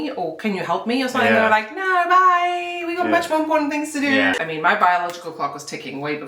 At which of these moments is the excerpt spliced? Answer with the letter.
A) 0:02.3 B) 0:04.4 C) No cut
B